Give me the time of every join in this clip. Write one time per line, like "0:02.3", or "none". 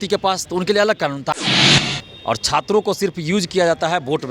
0:01.6